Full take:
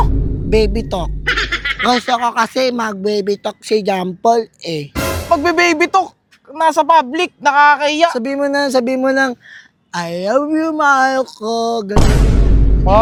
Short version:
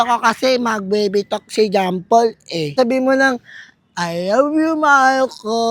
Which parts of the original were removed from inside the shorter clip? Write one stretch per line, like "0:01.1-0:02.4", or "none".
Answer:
0:04.9-0:08.7